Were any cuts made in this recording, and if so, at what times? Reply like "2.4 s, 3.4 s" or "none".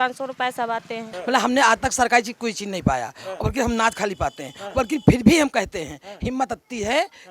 1.1 s